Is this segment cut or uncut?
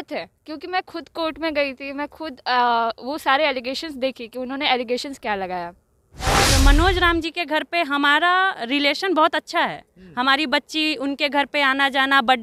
cut